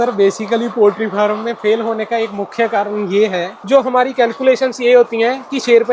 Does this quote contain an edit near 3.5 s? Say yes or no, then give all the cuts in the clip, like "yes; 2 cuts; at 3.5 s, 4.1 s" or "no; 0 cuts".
yes; 1 cut; at 3.5 s